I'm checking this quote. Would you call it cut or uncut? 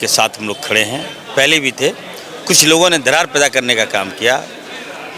uncut